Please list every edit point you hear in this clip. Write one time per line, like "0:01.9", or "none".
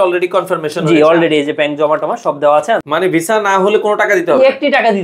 0:02.9